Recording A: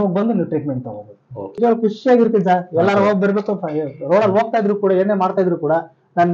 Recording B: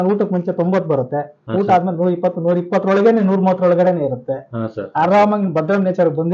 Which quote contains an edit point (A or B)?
A